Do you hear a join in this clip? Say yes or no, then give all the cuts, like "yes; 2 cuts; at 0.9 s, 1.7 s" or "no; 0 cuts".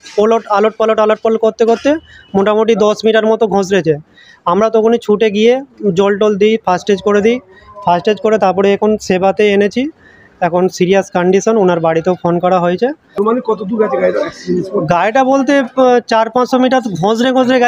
no; 0 cuts